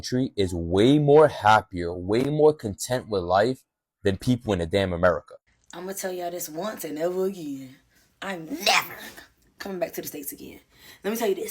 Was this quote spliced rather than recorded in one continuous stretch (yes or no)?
yes